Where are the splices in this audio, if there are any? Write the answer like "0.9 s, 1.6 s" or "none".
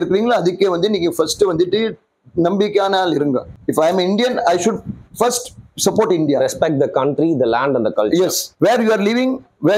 3.6 s, 8.4 s